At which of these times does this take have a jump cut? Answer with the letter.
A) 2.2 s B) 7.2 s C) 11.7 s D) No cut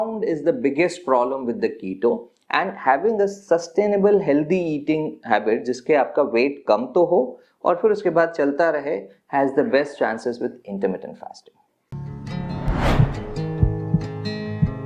C